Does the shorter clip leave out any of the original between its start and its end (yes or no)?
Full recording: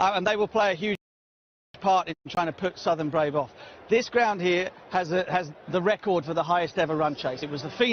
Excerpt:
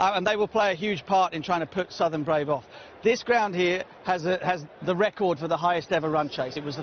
yes